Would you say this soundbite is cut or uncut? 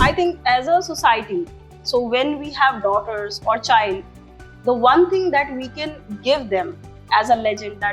uncut